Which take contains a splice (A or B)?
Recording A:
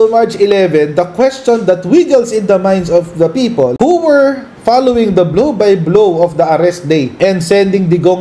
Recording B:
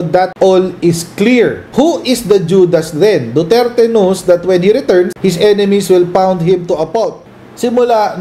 B